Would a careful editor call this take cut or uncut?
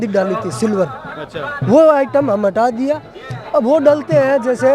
uncut